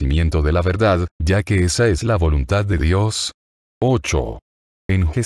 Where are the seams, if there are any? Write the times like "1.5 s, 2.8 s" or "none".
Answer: 1.1 s, 3.6 s

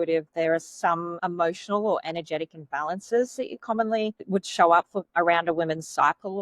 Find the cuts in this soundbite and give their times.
1.1 s

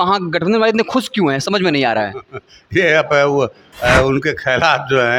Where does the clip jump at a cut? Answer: none

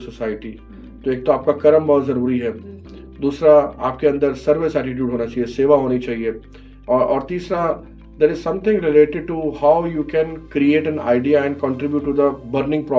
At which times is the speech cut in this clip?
none

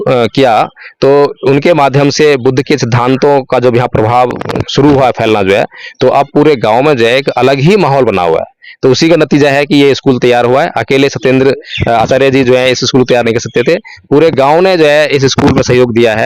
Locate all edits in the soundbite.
4.5 s

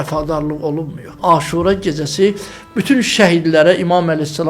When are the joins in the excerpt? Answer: 1.0 s

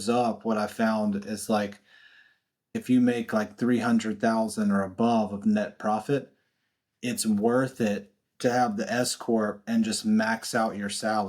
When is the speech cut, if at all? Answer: 2.7 s

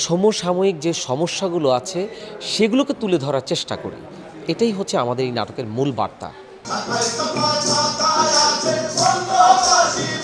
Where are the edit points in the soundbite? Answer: none

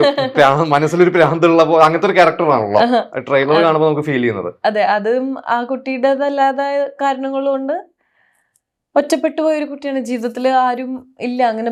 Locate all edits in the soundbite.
none

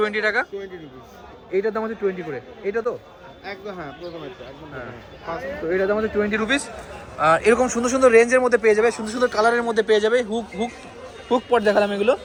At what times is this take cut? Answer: none

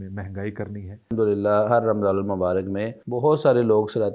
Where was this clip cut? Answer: 1.1 s, 3.0 s

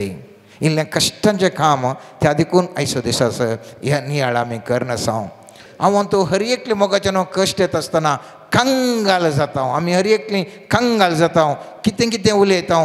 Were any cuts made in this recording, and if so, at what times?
5.6 s

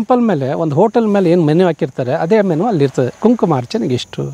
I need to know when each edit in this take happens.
none

